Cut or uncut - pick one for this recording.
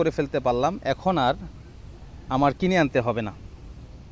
uncut